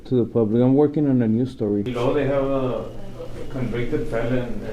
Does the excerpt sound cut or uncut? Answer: cut